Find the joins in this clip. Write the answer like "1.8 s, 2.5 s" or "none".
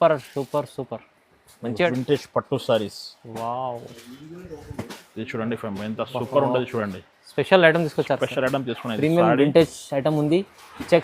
1.9 s